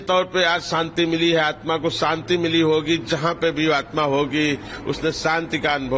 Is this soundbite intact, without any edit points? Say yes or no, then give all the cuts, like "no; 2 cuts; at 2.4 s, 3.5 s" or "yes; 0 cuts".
yes; 0 cuts